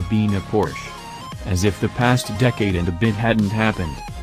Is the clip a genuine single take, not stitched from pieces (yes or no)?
yes